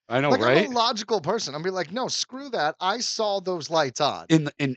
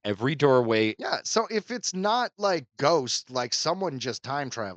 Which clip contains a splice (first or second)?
second